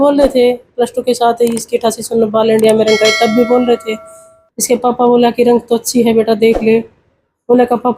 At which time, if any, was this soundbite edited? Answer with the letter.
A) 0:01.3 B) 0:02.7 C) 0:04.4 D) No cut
D